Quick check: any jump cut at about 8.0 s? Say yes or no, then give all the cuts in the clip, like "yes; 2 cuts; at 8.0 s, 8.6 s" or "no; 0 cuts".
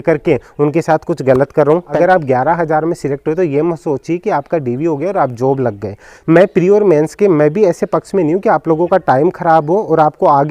no; 2 cuts; at 1.9 s, 6.1 s